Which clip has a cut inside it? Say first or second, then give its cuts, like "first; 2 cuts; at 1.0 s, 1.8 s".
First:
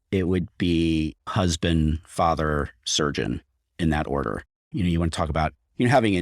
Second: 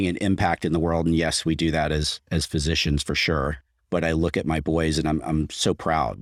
first; 2 cuts; at 1.2 s, 4.6 s